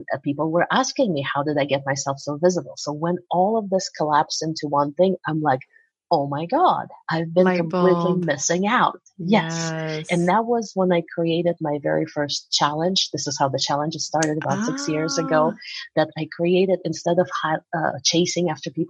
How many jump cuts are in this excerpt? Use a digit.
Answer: 0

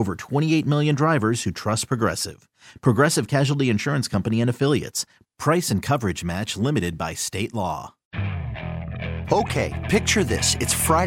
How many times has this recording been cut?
1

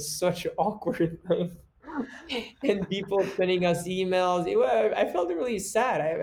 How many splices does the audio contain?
0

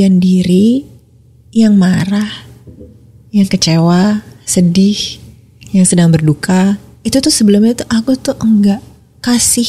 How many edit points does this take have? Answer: 0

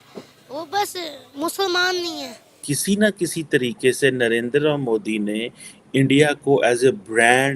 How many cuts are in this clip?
1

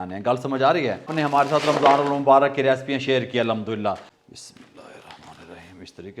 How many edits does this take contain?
2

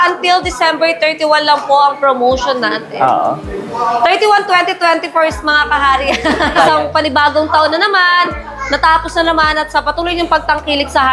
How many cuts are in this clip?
0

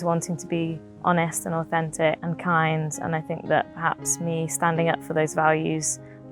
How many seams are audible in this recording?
1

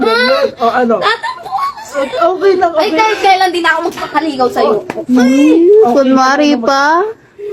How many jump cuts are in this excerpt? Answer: 0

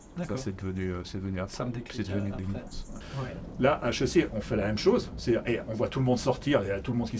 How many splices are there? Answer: 1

